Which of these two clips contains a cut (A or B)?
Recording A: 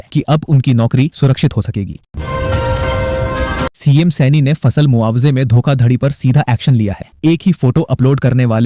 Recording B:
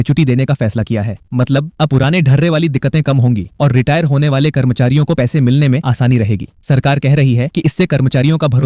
A